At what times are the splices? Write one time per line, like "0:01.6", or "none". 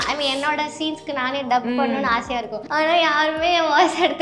0:02.6